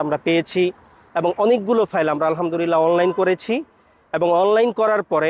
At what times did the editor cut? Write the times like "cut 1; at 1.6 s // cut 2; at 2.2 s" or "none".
none